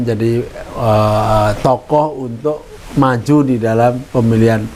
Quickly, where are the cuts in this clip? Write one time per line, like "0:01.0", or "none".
none